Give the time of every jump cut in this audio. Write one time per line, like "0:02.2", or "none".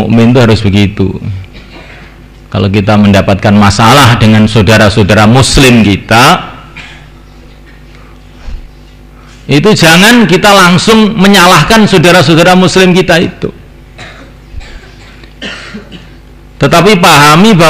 none